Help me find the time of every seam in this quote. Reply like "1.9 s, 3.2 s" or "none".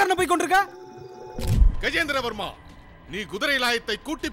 1.6 s